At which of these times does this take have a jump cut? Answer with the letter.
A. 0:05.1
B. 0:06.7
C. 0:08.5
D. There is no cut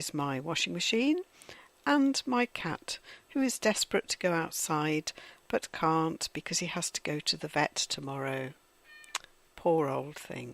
C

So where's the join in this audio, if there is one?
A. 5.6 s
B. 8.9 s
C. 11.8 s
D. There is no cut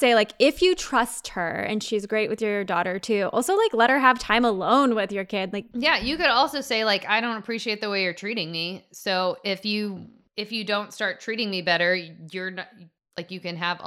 A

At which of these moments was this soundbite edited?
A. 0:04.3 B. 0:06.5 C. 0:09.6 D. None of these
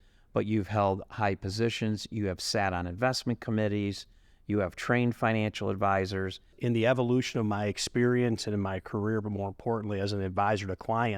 B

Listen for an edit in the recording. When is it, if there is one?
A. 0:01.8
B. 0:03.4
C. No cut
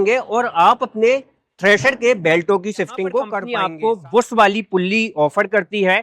B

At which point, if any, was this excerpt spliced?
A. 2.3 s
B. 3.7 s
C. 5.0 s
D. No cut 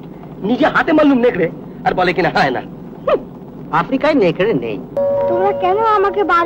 C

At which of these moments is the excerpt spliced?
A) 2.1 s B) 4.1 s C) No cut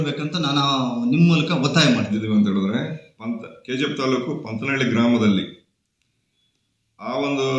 A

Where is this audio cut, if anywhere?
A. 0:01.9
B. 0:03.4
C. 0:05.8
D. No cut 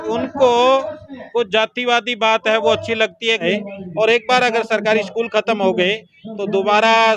B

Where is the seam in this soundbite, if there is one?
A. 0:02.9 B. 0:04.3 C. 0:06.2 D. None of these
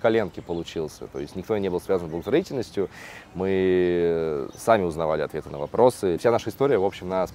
C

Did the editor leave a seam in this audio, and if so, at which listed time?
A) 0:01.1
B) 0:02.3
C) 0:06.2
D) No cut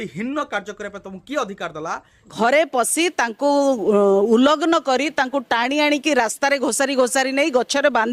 B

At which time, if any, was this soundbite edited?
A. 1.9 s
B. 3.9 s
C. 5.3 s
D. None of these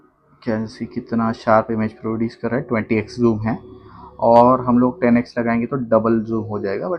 D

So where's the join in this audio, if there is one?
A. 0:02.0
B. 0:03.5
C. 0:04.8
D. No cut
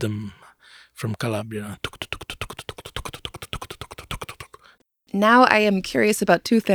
C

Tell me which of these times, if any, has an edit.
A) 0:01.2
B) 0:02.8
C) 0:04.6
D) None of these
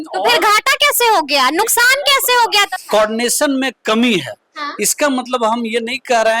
B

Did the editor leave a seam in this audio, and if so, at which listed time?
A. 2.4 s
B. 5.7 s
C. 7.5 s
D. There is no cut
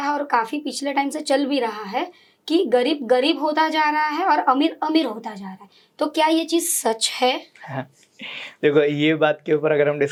D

